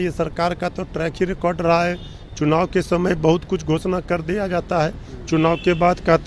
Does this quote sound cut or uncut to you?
uncut